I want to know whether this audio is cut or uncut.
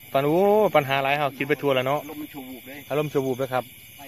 uncut